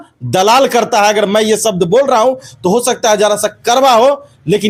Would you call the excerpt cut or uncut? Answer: uncut